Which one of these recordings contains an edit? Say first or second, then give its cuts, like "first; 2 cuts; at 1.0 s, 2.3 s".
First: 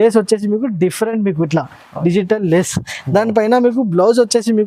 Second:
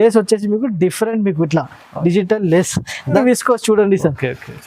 second; 1 cut; at 3.2 s